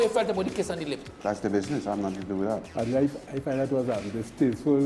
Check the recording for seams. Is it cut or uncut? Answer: cut